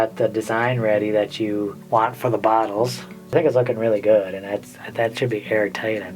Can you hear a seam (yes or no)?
yes